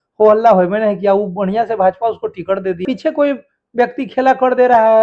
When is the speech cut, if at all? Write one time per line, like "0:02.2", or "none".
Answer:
0:02.8